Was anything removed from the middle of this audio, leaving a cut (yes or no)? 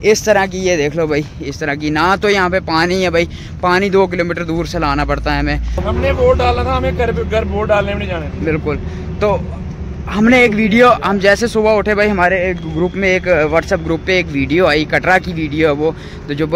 yes